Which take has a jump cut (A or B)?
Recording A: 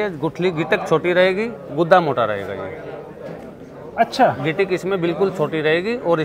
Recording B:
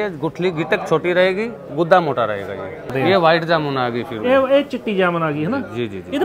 B